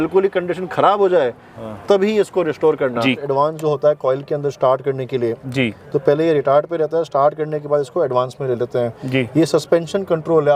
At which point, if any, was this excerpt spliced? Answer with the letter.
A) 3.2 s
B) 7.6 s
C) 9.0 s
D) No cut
A